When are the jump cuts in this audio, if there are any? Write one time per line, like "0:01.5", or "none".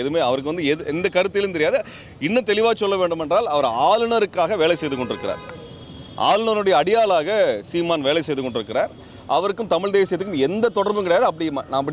none